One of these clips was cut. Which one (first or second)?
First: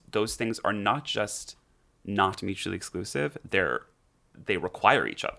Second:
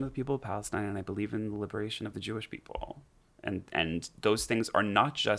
first